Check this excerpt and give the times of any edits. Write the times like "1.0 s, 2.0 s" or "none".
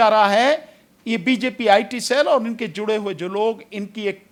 none

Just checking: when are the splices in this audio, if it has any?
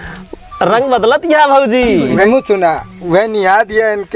2.3 s

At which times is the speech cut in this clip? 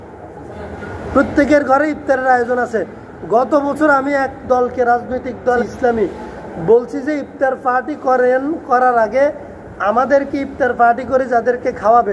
5.6 s

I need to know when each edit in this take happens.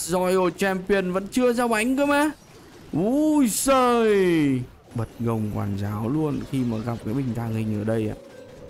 4.8 s

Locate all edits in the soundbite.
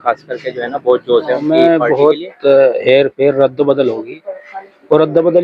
1.5 s

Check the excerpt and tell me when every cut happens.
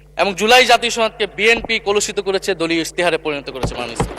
none

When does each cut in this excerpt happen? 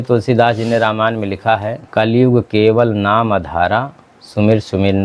1.8 s

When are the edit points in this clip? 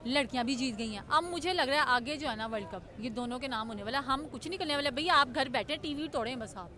none

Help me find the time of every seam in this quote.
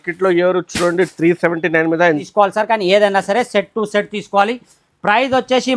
2.2 s

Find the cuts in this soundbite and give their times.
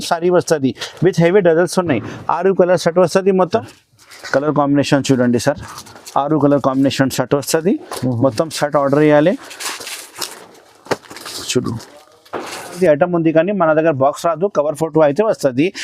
3.8 s, 12.7 s

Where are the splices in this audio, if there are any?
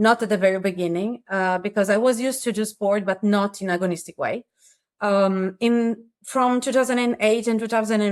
none

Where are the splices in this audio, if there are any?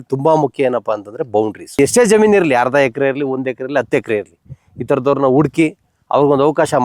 1.7 s

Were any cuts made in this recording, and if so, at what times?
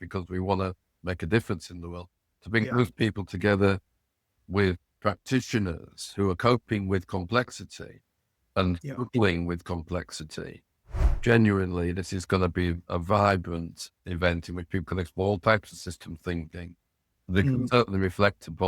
4.4 s, 11.1 s, 14.0 s

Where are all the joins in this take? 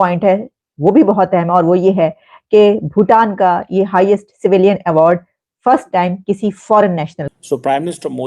7.2 s

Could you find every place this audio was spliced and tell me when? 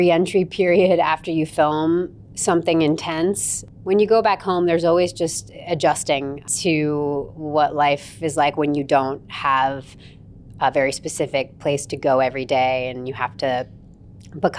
3.6 s, 6.4 s

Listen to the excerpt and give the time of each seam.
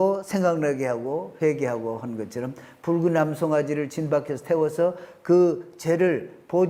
none

